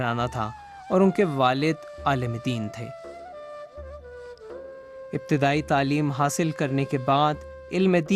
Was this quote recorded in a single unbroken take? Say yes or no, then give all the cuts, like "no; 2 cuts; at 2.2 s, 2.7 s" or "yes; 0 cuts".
no; 1 cut; at 5.8 s